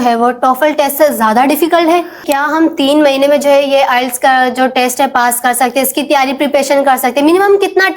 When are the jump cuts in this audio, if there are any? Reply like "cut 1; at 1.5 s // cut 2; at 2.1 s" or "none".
cut 1; at 2.3 s